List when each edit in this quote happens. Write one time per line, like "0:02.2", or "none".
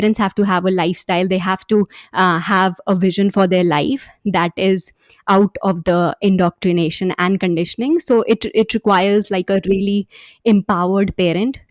none